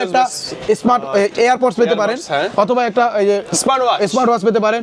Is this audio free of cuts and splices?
yes; 0 cuts

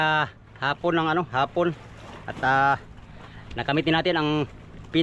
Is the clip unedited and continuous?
yes; 0 cuts

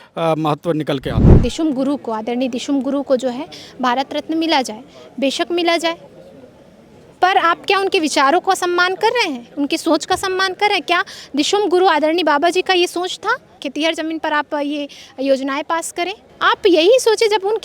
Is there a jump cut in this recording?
yes; 3 cuts; at 1.3 s, 13.6 s, 16.2 s

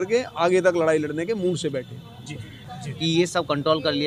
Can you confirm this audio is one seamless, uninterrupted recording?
yes; 0 cuts

